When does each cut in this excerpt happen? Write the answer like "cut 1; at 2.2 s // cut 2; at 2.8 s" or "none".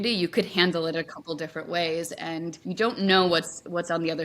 cut 1; at 2.6 s